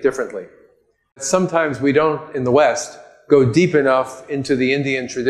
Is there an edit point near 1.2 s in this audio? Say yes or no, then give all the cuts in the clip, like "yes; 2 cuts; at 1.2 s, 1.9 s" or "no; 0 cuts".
yes; 1 cut; at 1.2 s